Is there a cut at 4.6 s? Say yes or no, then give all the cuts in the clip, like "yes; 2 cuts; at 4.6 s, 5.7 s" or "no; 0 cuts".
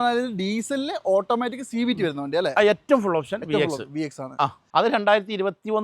yes; 1 cut; at 4.6 s